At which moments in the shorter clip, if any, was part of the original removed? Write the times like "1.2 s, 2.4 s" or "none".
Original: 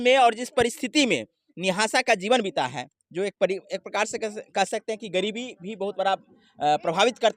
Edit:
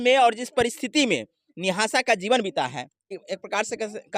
3.1 s